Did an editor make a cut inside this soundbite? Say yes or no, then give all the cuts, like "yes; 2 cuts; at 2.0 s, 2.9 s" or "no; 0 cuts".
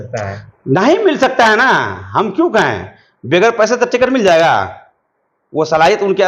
no; 0 cuts